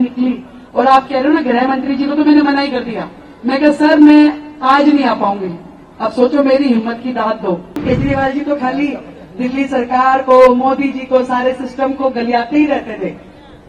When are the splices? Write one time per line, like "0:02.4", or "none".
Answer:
0:07.8